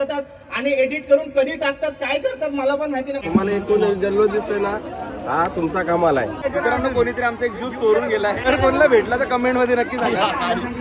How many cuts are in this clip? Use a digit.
3